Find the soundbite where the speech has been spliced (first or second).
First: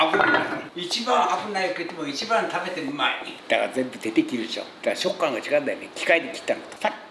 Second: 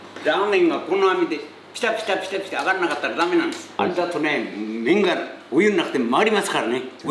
second